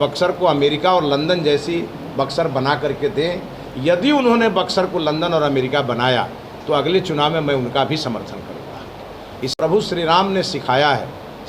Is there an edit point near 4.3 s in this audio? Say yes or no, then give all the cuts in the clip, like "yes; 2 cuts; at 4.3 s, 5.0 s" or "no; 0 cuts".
no; 1 cut; at 9.5 s